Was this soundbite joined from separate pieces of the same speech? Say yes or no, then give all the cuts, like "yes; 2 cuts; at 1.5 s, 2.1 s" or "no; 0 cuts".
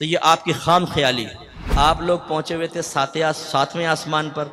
yes; 1 cut; at 1.6 s